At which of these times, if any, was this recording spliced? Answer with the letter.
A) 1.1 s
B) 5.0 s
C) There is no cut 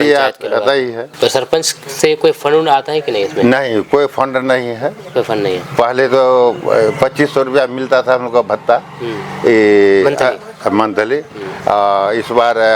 A